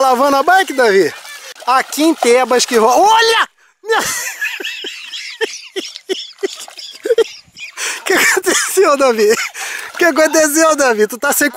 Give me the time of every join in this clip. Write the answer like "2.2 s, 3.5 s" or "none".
1.5 s